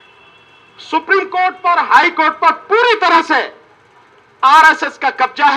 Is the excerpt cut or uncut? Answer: uncut